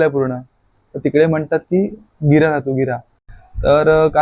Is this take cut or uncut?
cut